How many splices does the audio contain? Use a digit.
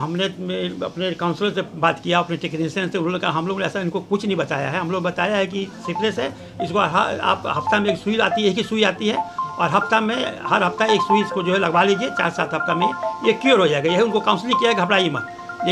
0